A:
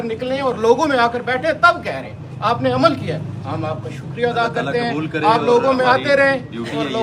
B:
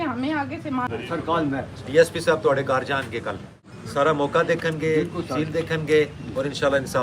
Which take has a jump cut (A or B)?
B